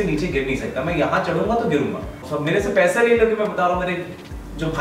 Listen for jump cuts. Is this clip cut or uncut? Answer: cut